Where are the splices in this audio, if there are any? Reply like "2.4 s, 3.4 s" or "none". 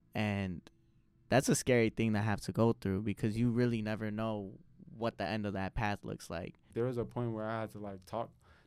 6.7 s